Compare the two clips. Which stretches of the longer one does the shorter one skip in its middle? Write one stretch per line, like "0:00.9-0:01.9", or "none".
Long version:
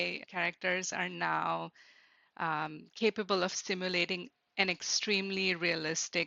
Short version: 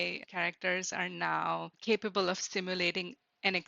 0:01.7-0:02.9